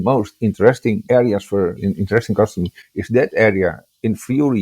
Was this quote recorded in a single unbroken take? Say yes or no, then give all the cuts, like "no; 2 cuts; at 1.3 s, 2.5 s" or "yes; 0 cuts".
no; 2 cuts; at 1.0 s, 1.8 s